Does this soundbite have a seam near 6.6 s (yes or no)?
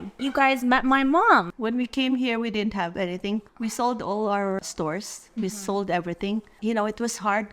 yes